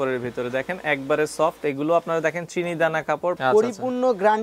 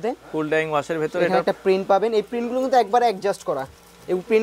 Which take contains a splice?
first; 1 cut; at 3.4 s

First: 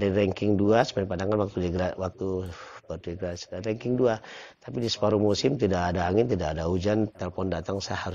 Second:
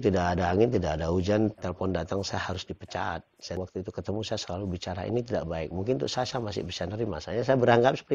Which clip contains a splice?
second; 1 cut; at 3.6 s

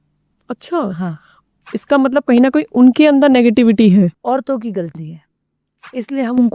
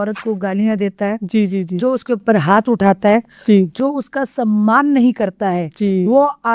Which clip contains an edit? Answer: first; 1 cut; at 4.2 s

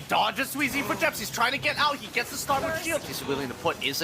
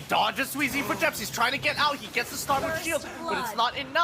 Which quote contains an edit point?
first; 1 cut; at 3.1 s

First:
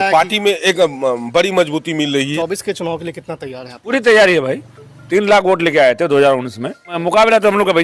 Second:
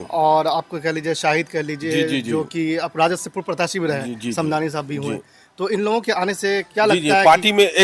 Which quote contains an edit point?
first; 4 cuts; at 2.3 s, 3.9 s, 5.0 s, 6.9 s

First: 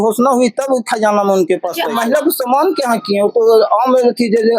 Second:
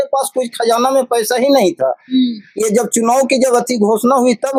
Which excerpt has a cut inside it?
first; 1 cut; at 1.8 s

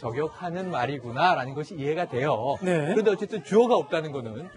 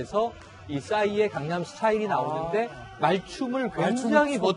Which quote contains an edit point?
second; 1 cut; at 3.1 s

